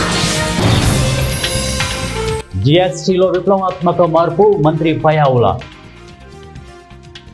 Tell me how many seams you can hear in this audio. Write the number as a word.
three